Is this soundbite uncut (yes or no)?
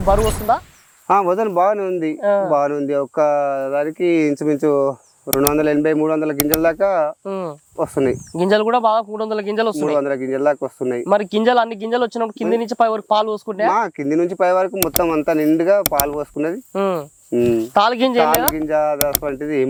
yes